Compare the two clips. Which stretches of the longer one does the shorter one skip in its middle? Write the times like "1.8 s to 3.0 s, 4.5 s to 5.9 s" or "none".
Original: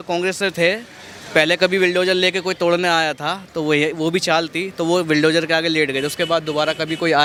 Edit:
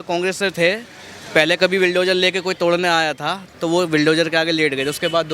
3.5 s to 4.6 s